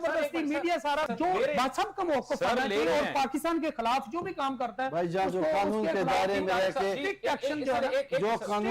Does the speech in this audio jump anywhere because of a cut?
yes; 1 cut; at 1.1 s

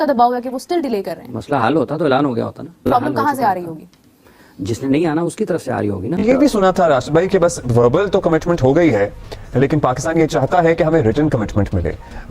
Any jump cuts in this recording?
yes; 1 cut; at 6.1 s

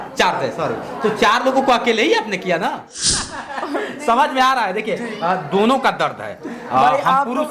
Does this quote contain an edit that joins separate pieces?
yes; 1 cut; at 3.1 s

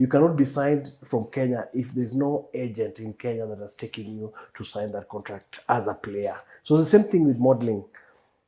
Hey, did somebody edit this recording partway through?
no; 0 cuts

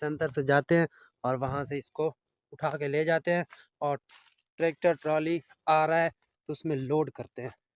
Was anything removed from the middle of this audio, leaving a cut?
no; 0 cuts

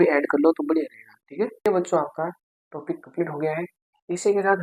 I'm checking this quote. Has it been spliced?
yes; 1 cut; at 1.7 s

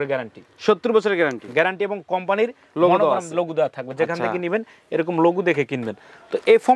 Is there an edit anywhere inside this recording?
no; 0 cuts

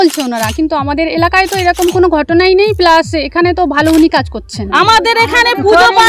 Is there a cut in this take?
yes; 1 cut; at 4.6 s

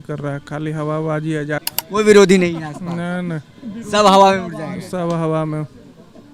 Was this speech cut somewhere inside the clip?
yes; 1 cut; at 1.6 s

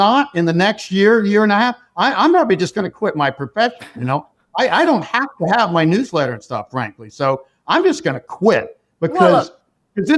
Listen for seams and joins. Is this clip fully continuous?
yes; 0 cuts

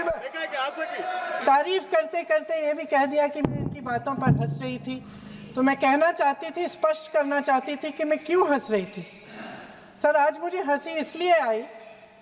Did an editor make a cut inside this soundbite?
yes; 1 cut; at 1.4 s

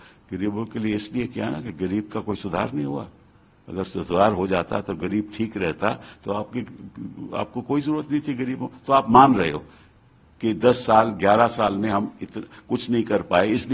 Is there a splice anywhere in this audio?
no; 0 cuts

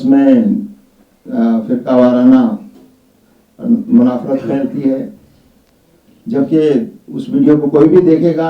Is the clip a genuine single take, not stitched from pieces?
yes; 0 cuts

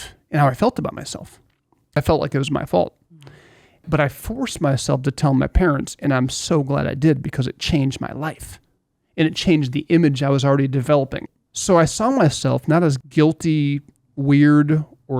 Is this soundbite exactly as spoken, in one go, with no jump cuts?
no; 4 cuts; at 2.0 s, 3.8 s, 11.2 s, 13.0 s

